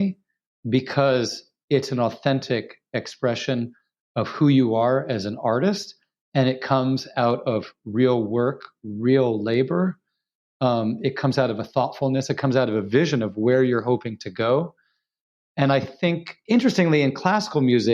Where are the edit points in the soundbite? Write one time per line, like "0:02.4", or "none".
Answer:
0:16.3

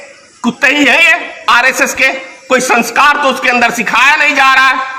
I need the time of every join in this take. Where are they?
none

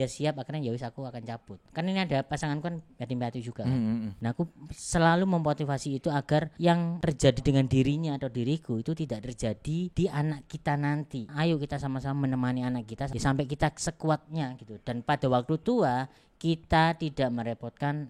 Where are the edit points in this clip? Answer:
0:01.6
0:04.1
0:06.8
0:09.9
0:11.3
0:13.1

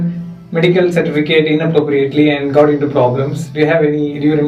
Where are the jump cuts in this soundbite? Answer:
none

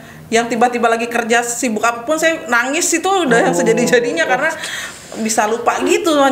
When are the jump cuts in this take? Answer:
none

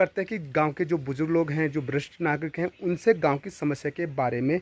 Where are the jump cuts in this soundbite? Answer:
none

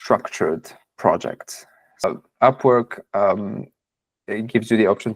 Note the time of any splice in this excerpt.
0:02.1

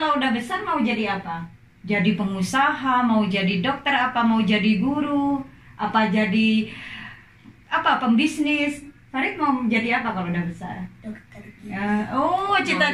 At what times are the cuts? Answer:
none

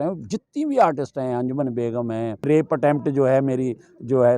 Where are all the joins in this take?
0:02.5

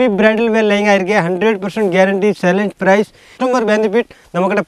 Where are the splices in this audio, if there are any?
0:03.3

